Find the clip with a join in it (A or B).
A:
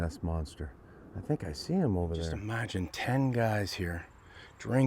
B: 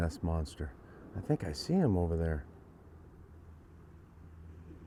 A